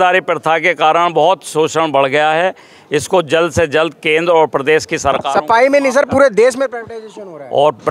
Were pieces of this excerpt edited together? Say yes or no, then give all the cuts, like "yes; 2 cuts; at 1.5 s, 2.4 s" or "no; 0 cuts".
no; 0 cuts